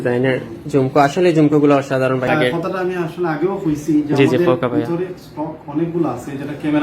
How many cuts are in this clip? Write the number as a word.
one